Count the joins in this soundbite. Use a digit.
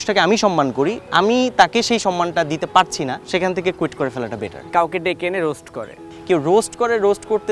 3